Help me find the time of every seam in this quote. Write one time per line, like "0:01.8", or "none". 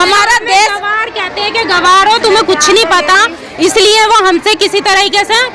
none